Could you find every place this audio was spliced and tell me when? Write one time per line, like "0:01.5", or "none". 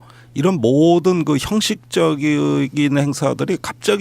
0:02.3